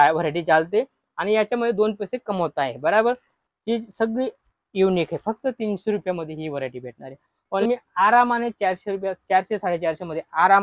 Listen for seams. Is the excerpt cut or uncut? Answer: cut